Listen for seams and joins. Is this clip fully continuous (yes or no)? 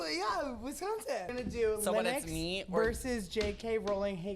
no